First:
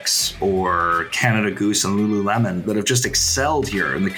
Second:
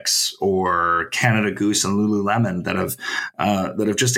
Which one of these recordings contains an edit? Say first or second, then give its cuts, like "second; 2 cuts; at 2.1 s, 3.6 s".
first; 1 cut; at 2.6 s